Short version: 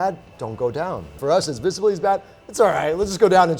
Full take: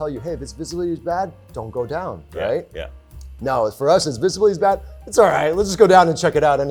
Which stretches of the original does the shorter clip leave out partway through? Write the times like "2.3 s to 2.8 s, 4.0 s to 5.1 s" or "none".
2.3 s to 3.7 s